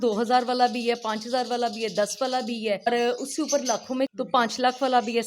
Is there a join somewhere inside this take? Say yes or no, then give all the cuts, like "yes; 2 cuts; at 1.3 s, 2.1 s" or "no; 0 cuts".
yes; 2 cuts; at 2.9 s, 4.1 s